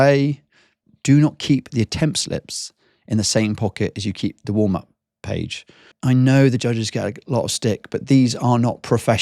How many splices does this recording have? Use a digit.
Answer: 2